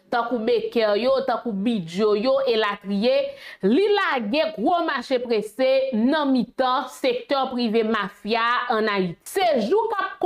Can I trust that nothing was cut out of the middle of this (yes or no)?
no